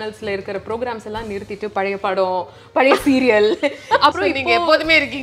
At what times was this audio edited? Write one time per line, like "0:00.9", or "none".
0:04.1